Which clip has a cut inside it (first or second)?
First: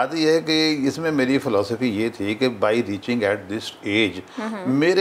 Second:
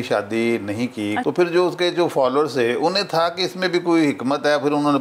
second